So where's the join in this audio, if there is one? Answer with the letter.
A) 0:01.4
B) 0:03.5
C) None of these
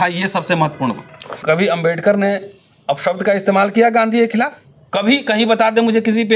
A